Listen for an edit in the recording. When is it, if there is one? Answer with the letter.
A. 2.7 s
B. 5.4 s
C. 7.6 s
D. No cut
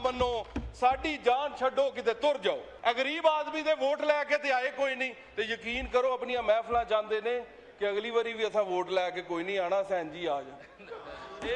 A